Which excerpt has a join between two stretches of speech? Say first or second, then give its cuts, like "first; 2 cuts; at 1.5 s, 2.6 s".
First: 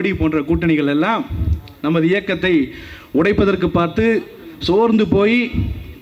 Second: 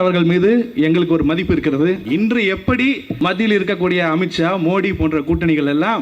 second; 2 cuts; at 2.0 s, 3.1 s